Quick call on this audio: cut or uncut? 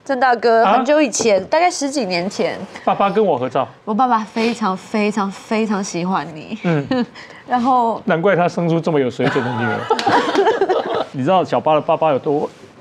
cut